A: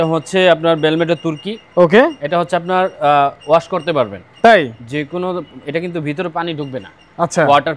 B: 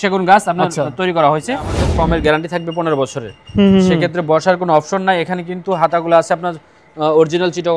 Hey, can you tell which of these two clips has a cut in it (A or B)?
B